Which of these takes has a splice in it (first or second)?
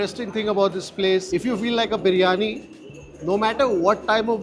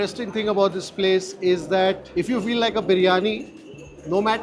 first